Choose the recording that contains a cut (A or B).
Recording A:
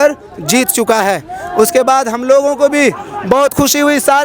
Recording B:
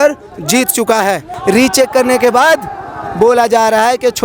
B